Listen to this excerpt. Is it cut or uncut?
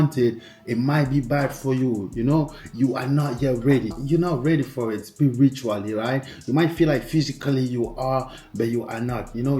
cut